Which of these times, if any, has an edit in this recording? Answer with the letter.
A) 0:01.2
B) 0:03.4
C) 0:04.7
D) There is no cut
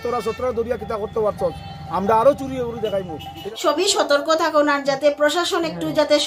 B